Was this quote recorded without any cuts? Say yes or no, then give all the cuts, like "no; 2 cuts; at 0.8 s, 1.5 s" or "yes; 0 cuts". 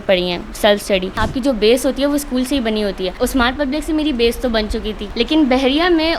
no; 3 cuts; at 1.2 s, 3.2 s, 5.0 s